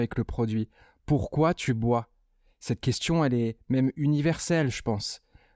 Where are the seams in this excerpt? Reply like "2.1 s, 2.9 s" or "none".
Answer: none